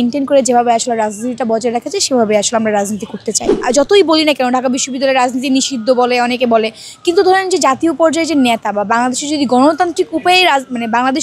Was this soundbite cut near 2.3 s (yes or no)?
no